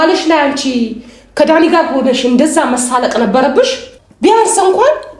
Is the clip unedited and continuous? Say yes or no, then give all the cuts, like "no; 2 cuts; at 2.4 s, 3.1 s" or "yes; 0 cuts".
yes; 0 cuts